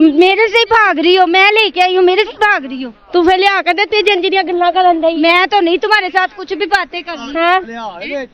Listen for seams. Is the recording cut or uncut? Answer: uncut